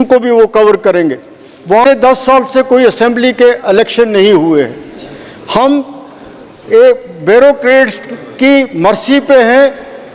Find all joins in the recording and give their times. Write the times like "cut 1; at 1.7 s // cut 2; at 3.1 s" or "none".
cut 1; at 1.8 s

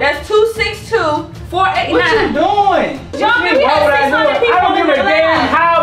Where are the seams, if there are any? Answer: cut 1; at 3.1 s

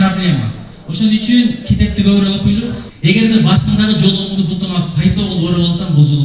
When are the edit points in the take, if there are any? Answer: cut 1; at 2.8 s

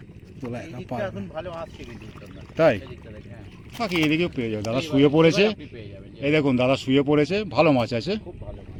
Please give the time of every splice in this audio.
none

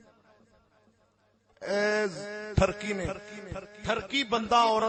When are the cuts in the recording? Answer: none

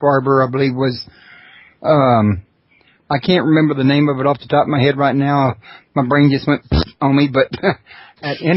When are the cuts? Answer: cut 1; at 6.4 s

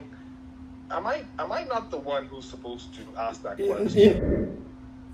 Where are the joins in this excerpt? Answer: cut 1; at 4.2 s

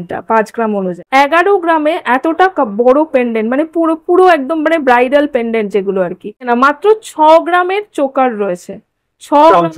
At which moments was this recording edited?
cut 1; at 1.0 s // cut 2; at 6.4 s

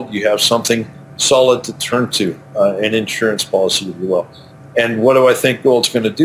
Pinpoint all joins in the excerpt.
none

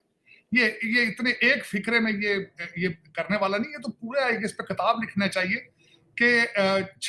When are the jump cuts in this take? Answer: none

